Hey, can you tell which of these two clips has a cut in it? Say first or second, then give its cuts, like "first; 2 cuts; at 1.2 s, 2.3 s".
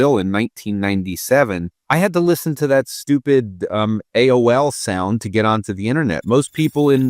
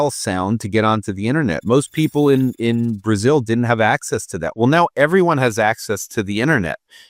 first; 1 cut; at 1.7 s